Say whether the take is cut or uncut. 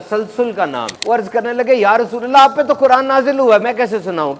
cut